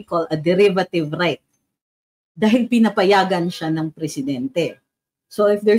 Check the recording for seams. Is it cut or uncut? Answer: uncut